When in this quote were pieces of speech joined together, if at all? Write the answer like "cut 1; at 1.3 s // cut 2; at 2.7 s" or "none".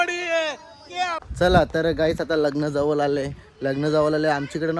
cut 1; at 1.2 s